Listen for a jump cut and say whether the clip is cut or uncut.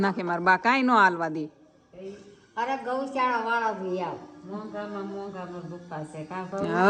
uncut